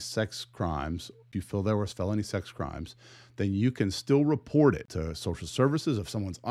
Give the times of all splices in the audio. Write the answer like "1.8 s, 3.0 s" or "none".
1.2 s, 4.9 s